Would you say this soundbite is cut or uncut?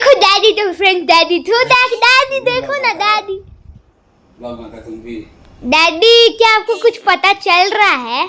uncut